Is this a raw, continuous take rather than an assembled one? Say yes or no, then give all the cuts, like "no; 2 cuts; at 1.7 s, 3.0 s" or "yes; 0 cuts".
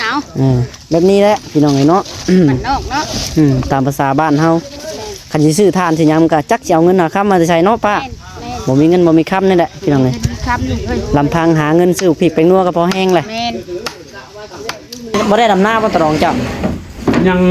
no; 1 cut; at 15.1 s